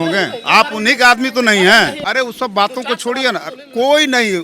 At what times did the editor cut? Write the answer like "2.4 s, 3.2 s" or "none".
2.0 s